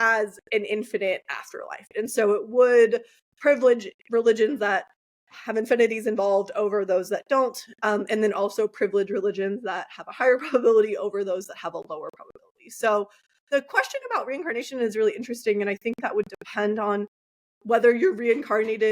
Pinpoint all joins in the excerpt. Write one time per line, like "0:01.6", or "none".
0:01.9